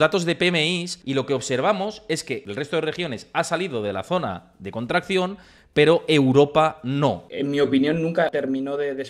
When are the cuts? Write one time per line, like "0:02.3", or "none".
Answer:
0:00.9
0:02.3
0:07.3
0:08.3

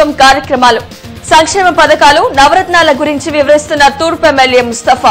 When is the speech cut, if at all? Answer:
none

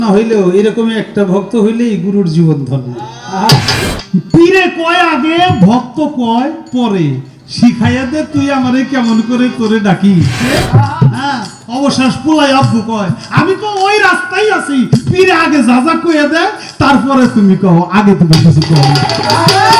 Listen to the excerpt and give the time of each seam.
0:03.9
0:10.4

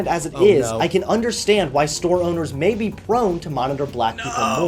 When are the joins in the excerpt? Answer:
none

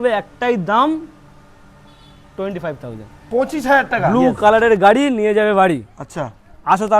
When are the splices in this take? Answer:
0:04.1

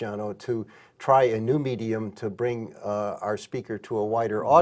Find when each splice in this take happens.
0:01.2

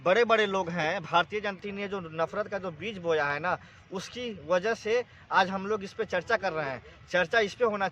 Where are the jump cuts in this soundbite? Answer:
0:01.6

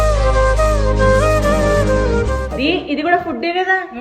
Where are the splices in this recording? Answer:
0:02.4

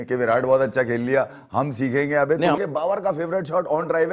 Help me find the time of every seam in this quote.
0:02.6

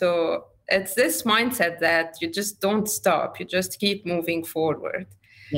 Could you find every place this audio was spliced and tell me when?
none

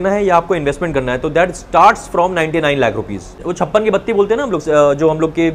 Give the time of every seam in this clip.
0:03.4

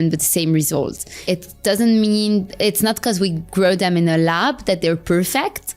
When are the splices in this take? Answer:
0:01.2

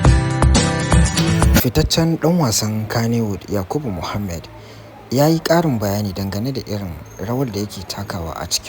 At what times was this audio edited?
0:01.6

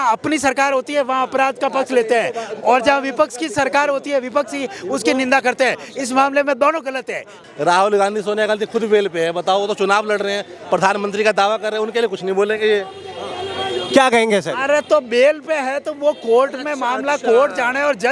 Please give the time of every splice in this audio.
0:07.3

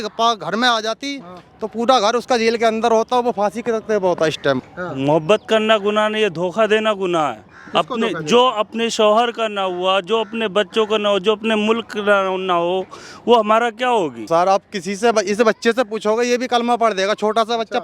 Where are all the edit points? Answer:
0:04.8
0:14.3

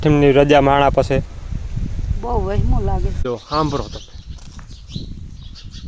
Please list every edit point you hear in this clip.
0:03.2

